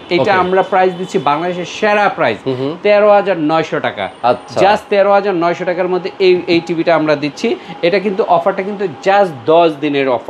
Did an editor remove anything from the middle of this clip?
no; 0 cuts

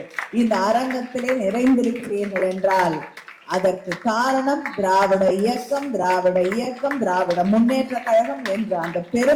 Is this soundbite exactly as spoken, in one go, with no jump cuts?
yes; 0 cuts

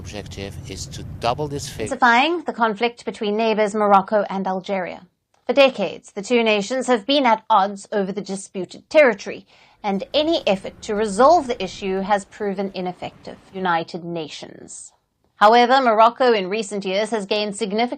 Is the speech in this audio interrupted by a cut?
yes; 2 cuts; at 1.9 s, 13.6 s

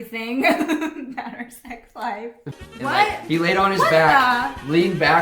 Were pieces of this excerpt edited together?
yes; 1 cut; at 2.4 s

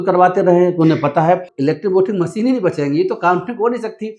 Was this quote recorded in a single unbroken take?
no; 1 cut; at 1.5 s

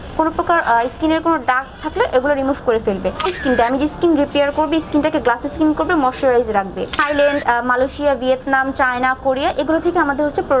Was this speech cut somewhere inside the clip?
yes; 2 cuts; at 3.2 s, 7.0 s

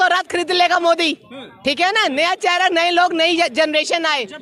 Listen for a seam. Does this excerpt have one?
no; 0 cuts

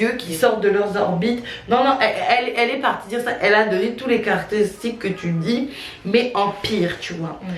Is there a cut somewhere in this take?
no; 0 cuts

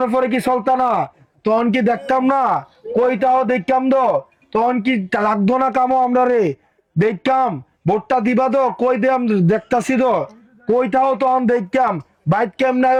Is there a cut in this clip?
no; 0 cuts

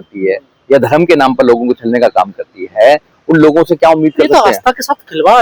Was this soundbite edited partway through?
no; 0 cuts

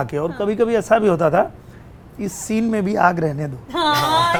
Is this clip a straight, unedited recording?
yes; 0 cuts

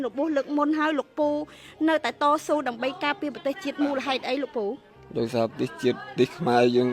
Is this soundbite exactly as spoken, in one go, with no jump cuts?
yes; 0 cuts

